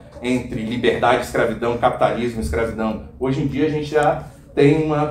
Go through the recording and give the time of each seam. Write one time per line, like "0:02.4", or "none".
none